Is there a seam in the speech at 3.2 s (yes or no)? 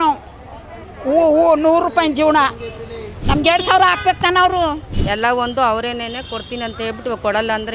no